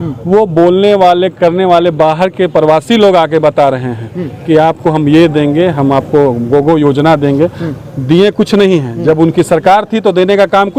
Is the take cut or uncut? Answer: uncut